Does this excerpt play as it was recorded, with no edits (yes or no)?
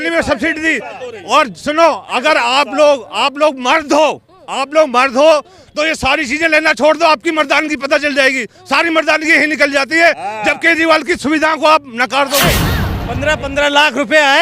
no